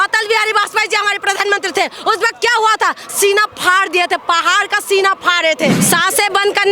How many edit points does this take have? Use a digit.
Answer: 1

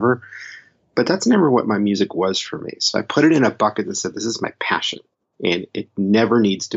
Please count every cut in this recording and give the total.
0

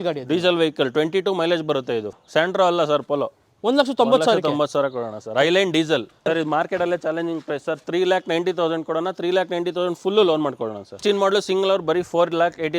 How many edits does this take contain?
3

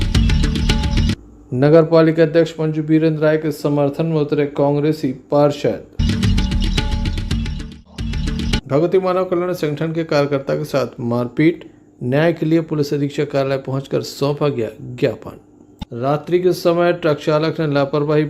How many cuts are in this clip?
1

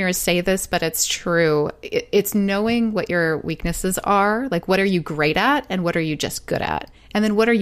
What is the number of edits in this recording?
0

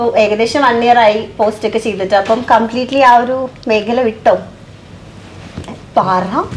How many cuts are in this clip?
0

